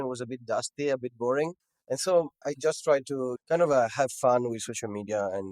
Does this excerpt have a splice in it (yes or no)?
yes